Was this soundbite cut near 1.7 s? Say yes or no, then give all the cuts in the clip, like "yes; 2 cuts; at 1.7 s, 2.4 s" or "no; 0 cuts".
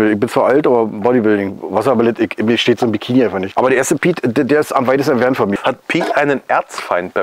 no; 2 cuts; at 3.4 s, 5.5 s